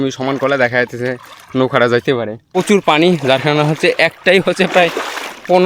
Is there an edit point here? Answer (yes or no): yes